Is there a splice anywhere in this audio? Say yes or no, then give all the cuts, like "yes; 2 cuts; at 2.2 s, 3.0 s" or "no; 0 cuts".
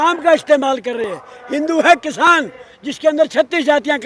no; 0 cuts